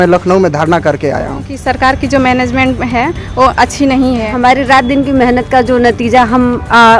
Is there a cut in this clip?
yes; 1 cut; at 4.3 s

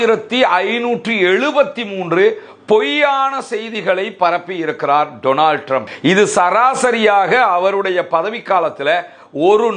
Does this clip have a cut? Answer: yes; 1 cut; at 5.9 s

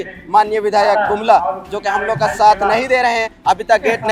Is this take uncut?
yes; 0 cuts

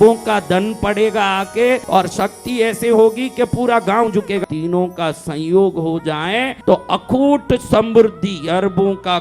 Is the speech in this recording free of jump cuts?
no; 3 cuts; at 1.8 s, 4.4 s, 6.5 s

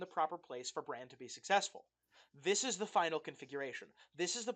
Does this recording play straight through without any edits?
yes; 0 cuts

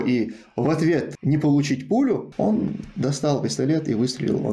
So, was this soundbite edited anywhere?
yes; 2 cuts; at 1.1 s, 2.3 s

